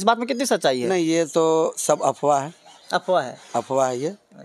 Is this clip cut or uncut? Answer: uncut